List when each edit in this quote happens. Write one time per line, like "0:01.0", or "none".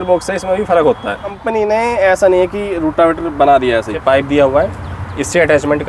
0:01.4
0:03.9

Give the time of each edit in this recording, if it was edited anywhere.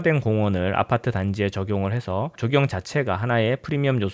none

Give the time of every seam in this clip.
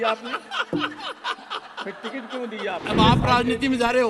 0:02.8

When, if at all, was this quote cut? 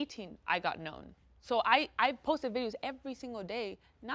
none

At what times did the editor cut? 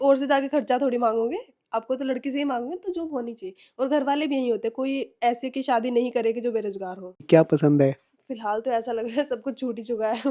0:07.2

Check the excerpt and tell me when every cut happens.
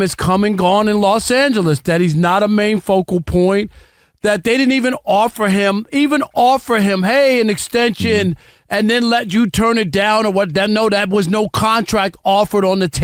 none

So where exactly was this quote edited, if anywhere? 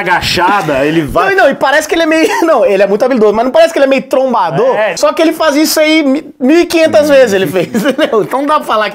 0:04.9

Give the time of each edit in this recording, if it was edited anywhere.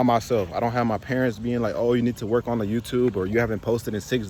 none

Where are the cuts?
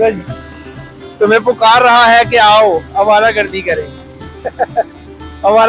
none

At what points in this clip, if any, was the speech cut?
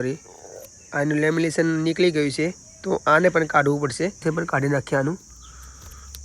0:04.2

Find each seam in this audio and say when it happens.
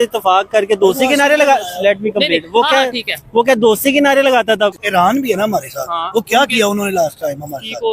0:04.8

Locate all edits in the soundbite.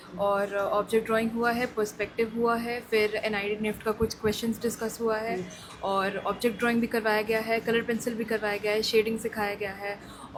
none

